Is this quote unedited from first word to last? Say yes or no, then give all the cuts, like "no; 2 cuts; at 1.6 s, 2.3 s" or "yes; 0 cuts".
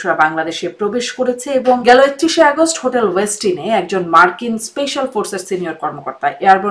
no; 1 cut; at 1.8 s